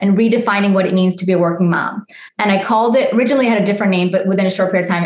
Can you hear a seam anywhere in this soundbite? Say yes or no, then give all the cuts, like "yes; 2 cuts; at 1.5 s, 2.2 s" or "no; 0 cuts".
no; 0 cuts